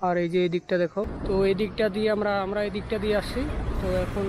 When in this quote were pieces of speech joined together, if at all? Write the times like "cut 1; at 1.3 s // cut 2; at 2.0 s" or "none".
cut 1; at 1.1 s